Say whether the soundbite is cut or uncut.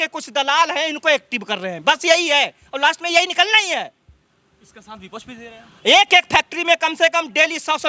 uncut